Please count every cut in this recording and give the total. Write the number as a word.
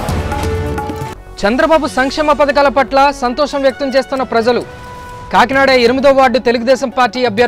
one